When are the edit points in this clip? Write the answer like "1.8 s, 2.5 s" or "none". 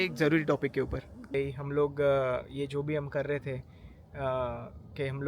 1.3 s